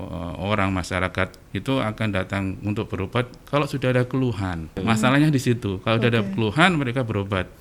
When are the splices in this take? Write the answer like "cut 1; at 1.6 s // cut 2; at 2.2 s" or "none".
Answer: cut 1; at 4.8 s